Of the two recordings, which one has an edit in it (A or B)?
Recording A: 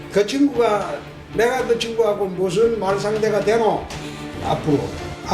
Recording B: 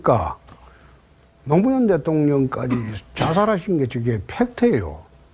A